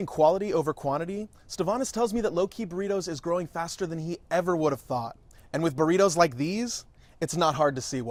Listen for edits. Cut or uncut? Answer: uncut